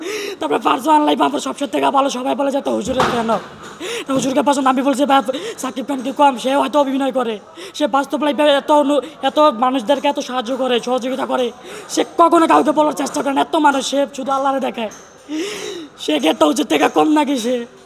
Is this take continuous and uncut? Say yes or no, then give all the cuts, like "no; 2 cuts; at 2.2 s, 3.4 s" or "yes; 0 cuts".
yes; 0 cuts